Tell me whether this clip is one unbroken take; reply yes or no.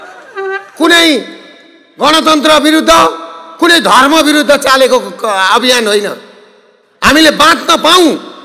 yes